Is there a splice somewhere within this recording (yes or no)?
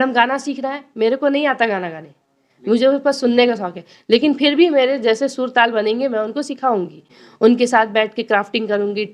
no